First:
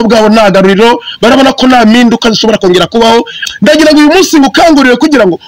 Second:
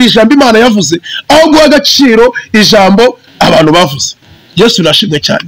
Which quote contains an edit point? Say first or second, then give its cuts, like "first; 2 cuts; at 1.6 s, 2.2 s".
first; 1 cut; at 3.4 s